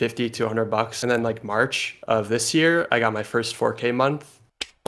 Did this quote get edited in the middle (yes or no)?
yes